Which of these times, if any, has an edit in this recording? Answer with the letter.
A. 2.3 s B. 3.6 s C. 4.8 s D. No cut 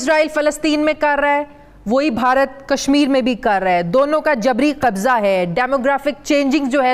D